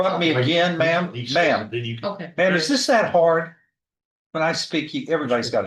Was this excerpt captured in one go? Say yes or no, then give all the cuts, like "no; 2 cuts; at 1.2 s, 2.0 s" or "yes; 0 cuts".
yes; 0 cuts